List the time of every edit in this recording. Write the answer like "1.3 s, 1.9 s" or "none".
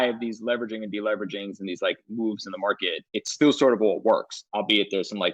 3.0 s, 4.4 s